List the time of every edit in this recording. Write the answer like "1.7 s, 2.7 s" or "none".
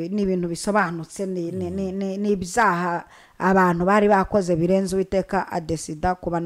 none

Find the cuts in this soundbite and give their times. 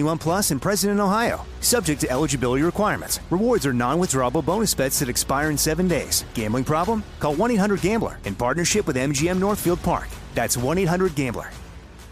none

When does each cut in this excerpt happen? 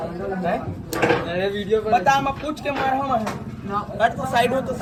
none

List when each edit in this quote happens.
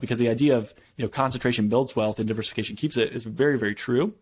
none

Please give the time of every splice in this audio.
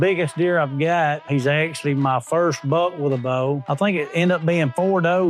1.2 s, 3.7 s

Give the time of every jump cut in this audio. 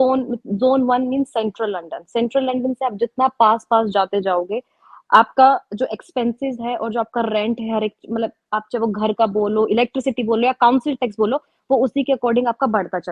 none

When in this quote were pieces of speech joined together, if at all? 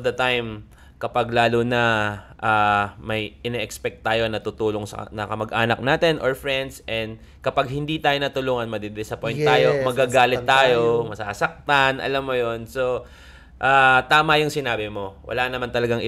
none

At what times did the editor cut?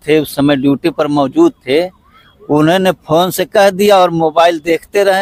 none

